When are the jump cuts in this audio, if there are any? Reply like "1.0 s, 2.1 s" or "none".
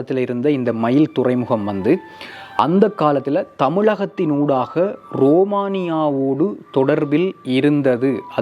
none